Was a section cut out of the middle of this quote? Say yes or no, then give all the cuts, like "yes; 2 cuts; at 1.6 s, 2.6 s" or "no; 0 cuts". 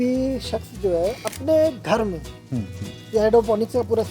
no; 0 cuts